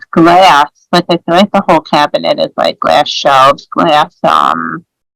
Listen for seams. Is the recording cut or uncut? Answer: uncut